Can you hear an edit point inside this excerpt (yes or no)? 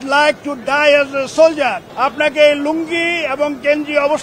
yes